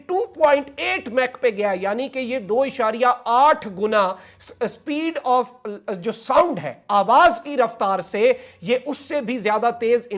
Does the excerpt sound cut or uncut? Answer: uncut